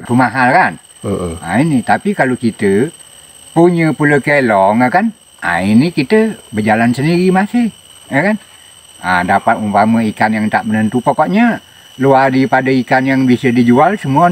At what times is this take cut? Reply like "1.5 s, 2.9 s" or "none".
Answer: none